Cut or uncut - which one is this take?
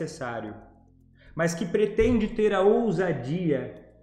uncut